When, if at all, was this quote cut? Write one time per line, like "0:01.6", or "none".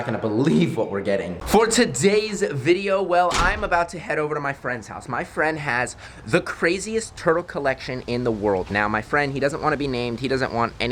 none